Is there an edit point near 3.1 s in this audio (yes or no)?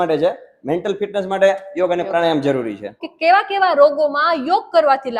yes